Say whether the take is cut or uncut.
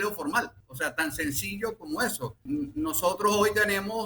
cut